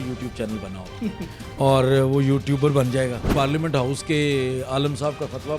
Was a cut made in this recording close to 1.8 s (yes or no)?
no